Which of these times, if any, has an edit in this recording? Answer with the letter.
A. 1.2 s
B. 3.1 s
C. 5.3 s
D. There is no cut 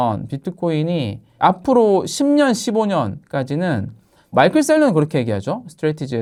D